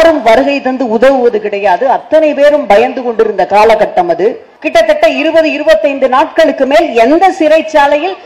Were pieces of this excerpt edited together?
yes; 1 cut; at 4.5 s

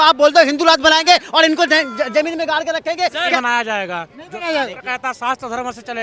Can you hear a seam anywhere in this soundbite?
yes; 1 cut; at 3.4 s

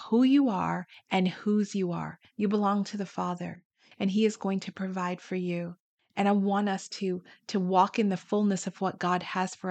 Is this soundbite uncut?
yes; 0 cuts

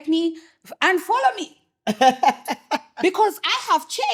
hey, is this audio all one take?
yes; 0 cuts

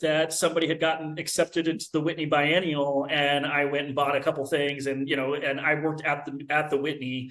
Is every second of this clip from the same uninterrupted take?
yes; 0 cuts

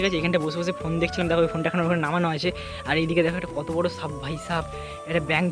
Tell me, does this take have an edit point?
no; 0 cuts

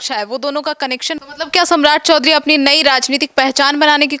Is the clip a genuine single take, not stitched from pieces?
no; 1 cut; at 1.2 s

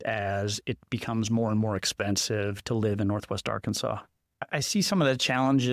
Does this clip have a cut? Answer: yes; 2 cuts; at 2.6 s, 4.4 s

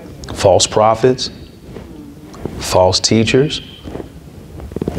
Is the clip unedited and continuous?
yes; 0 cuts

